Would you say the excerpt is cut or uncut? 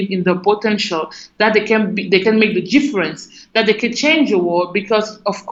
uncut